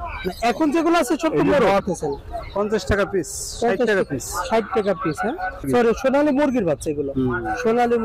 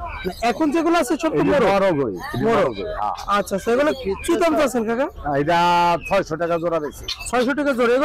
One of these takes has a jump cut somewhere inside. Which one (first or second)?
first